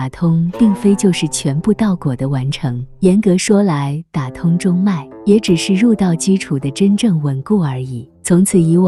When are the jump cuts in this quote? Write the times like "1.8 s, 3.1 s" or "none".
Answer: none